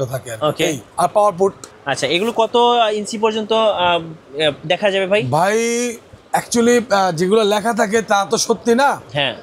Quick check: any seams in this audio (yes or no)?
no